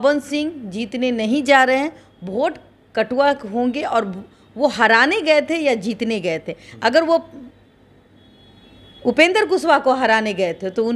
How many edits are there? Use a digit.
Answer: 0